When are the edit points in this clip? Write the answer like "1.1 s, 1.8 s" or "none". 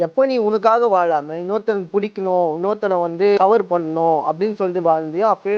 none